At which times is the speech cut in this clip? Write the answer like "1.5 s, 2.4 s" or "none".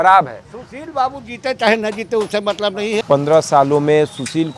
3.0 s